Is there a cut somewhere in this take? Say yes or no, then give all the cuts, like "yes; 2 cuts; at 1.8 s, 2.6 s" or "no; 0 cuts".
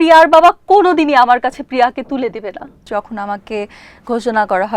yes; 1 cut; at 2.9 s